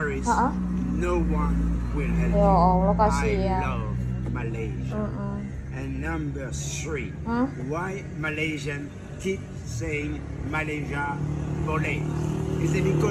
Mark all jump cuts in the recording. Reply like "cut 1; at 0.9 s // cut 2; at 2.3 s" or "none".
none